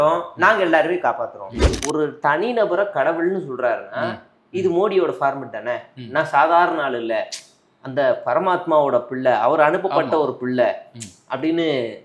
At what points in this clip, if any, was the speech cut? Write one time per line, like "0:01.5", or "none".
0:01.5